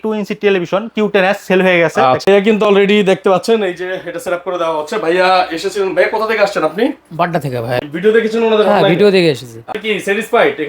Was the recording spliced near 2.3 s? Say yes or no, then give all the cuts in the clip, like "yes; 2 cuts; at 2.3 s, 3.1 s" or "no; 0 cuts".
yes; 3 cuts; at 2.3 s, 7.7 s, 9.8 s